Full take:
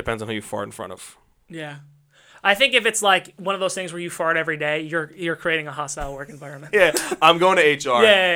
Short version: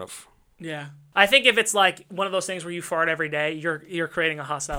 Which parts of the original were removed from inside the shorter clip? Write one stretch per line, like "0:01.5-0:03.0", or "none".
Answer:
0:01.9-0:02.2